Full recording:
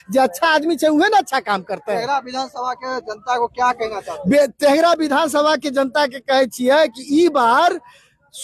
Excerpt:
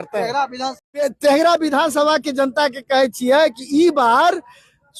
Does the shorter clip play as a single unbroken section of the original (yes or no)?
no